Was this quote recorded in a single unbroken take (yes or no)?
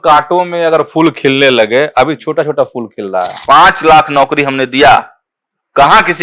no